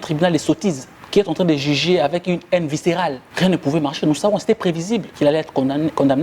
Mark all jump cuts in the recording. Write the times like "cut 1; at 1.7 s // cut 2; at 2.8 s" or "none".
cut 1; at 0.9 s // cut 2; at 3.2 s // cut 3; at 5.1 s